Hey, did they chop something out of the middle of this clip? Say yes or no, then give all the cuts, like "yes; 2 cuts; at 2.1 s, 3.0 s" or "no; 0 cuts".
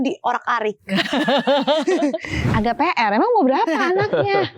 yes; 1 cut; at 2.3 s